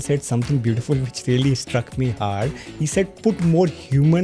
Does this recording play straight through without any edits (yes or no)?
yes